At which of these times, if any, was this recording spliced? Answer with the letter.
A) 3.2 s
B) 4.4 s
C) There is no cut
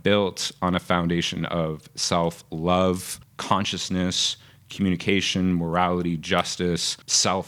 C